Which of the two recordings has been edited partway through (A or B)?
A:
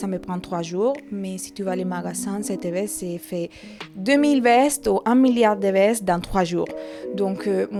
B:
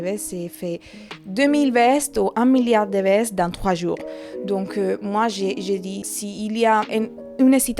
B